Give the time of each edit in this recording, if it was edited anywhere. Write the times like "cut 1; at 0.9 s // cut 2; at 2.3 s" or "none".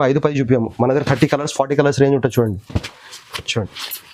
none

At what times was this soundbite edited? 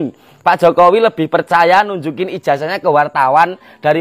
none

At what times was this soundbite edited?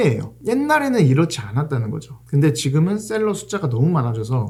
none

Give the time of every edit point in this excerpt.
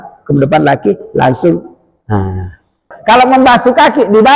cut 1; at 2.9 s

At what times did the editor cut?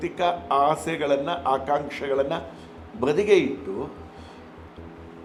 none

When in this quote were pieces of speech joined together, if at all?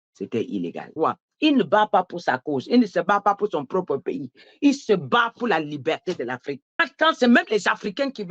cut 1; at 0.9 s // cut 2; at 6.8 s

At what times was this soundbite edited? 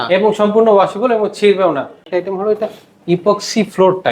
cut 1; at 2.1 s

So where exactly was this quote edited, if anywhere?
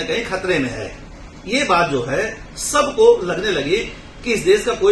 none

